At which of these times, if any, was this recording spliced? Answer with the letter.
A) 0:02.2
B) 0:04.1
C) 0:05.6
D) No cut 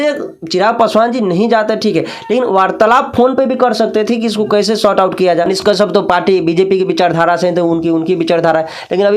C